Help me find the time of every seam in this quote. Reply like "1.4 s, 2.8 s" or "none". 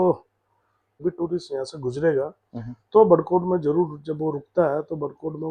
0.9 s